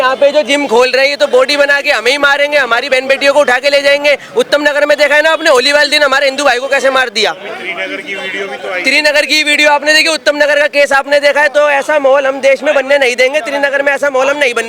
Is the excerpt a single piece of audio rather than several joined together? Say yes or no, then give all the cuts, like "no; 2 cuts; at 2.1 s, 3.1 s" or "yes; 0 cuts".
yes; 0 cuts